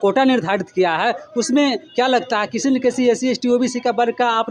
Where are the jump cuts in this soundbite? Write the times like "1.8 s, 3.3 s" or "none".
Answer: none

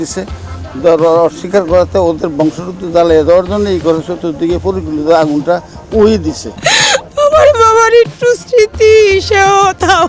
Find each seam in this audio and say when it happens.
6.5 s

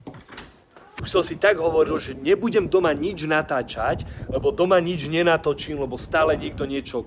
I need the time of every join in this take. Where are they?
1.0 s

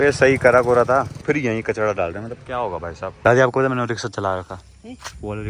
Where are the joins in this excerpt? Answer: 1.2 s, 3.1 s

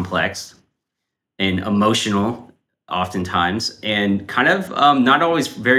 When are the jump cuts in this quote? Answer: none

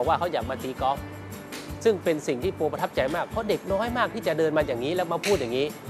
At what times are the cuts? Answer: none

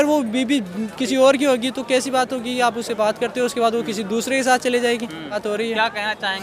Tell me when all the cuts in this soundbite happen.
5.3 s

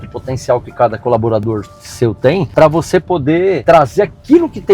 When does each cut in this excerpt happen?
2.5 s, 3.6 s

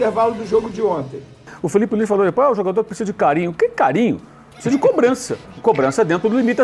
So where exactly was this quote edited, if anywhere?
1.5 s

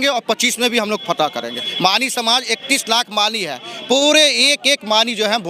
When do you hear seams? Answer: none

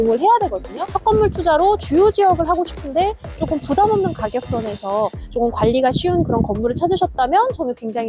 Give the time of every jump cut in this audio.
1.0 s

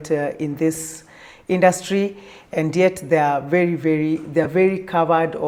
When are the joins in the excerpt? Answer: none

